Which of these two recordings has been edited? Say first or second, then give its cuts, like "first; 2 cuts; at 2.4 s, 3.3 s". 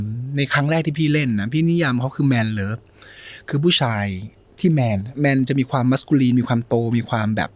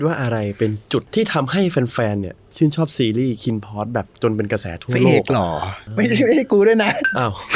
second; 2 cuts; at 1.1 s, 5.8 s